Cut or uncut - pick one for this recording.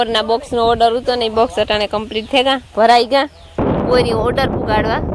cut